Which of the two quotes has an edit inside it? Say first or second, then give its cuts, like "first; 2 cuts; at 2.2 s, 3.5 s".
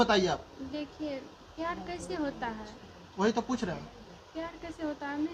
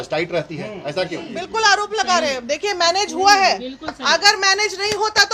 second; 1 cut; at 1.4 s